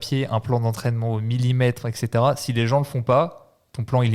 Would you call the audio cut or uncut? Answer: uncut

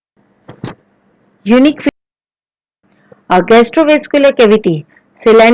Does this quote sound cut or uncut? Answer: uncut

